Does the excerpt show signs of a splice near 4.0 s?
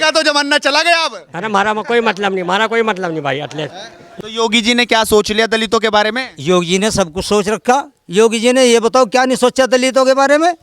yes; 1 cut; at 4.0 s

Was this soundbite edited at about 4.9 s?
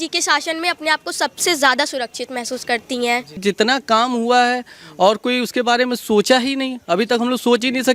no; 1 cut; at 3.4 s

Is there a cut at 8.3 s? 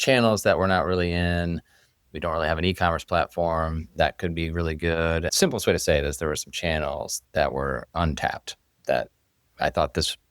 no; 1 cut; at 5.3 s

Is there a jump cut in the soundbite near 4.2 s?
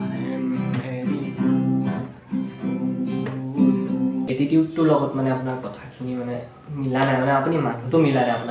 yes; 1 cut; at 4.2 s

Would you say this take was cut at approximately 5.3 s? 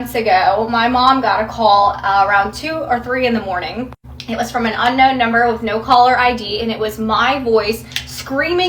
no; 0 cuts

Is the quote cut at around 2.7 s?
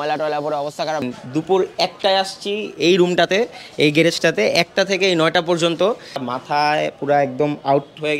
no; 2 cuts; at 1.0 s, 6.3 s

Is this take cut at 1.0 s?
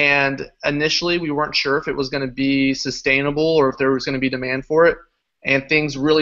yes; 1 cut; at 1.0 s

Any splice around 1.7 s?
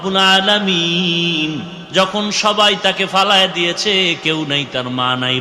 yes; 1 cut; at 1.7 s

